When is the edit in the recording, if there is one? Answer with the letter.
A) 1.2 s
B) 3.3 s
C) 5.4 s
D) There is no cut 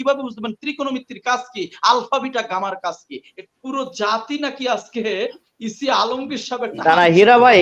B